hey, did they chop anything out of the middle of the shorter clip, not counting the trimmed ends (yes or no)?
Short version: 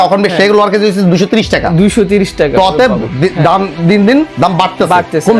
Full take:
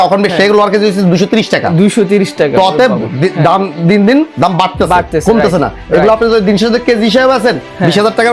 no